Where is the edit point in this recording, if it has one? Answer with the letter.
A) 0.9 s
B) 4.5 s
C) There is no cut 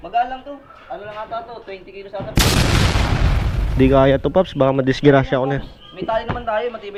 C